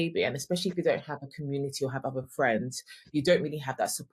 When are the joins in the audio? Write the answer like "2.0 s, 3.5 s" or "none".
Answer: 3.0 s